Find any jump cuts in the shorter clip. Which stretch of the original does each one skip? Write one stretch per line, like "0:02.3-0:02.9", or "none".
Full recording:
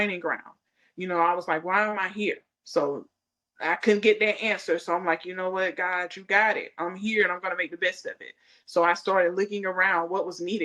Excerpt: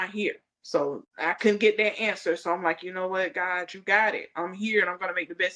0:03.1-0:03.5